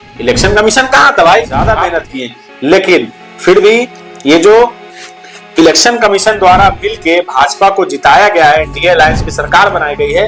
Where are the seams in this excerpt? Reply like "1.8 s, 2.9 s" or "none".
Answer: 1.7 s

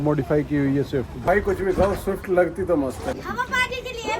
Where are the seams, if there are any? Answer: none

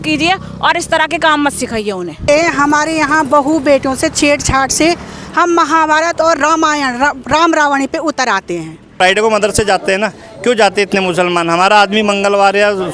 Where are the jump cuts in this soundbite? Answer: 2.3 s, 9.0 s

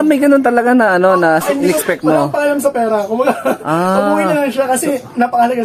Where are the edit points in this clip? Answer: none

